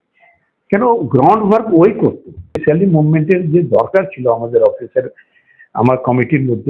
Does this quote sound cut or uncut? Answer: cut